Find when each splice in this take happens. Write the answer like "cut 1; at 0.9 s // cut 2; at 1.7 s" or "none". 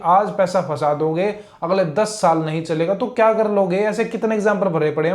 none